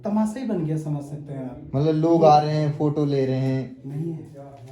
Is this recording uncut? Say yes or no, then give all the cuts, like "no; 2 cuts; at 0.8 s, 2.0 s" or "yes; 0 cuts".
yes; 0 cuts